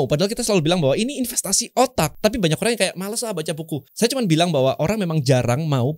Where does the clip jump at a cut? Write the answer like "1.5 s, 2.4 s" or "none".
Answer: 2.1 s, 3.9 s